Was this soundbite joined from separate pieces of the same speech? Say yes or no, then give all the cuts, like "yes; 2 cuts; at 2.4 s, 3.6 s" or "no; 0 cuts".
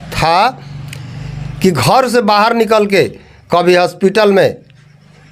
no; 0 cuts